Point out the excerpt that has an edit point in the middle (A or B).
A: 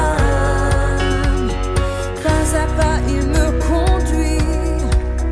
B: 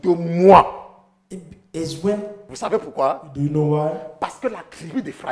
B